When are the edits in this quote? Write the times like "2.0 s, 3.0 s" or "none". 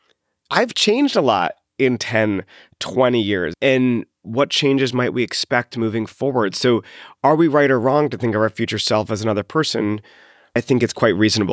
3.5 s, 10.6 s